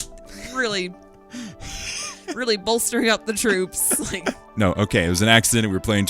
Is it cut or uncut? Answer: cut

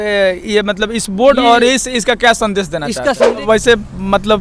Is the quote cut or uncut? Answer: cut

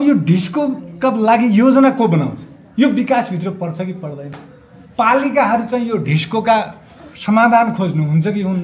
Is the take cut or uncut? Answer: uncut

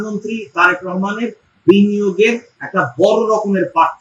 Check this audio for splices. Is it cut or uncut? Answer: uncut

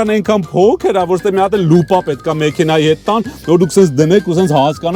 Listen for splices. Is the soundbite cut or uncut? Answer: uncut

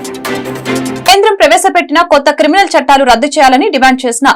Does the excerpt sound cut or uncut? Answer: cut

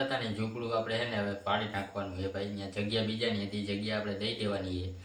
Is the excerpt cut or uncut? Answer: uncut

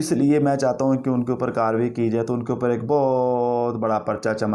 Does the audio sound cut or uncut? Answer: uncut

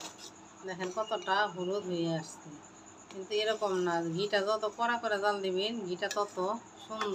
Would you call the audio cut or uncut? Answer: uncut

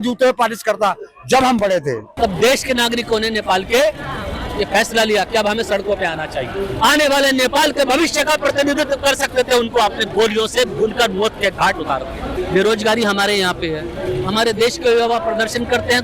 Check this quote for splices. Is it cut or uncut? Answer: cut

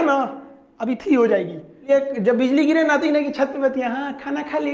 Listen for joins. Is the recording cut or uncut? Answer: cut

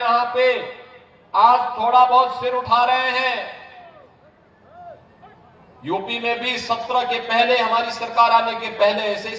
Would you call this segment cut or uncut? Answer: uncut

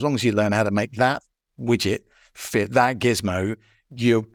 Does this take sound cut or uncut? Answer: uncut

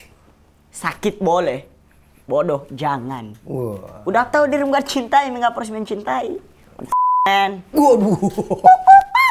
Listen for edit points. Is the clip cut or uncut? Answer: uncut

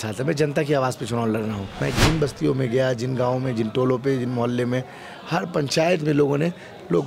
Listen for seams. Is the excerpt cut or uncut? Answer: cut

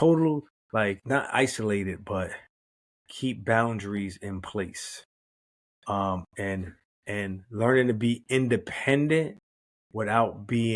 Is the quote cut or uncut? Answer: cut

